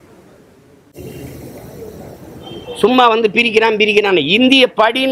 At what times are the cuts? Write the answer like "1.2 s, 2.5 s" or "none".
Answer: none